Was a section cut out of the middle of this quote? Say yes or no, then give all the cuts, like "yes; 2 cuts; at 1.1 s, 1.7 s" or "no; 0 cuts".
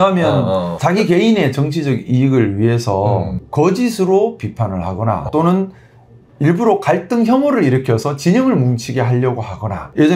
yes; 1 cut; at 5.2 s